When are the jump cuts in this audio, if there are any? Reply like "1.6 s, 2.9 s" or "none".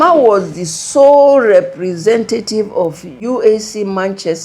3.1 s